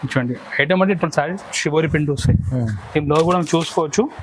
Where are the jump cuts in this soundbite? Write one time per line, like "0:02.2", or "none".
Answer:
0:01.0

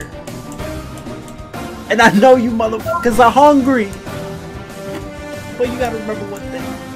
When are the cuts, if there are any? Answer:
0:03.9
0:05.6

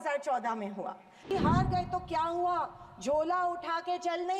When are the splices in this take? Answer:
0:01.3

